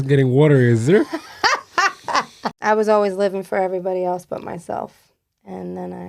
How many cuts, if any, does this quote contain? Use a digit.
1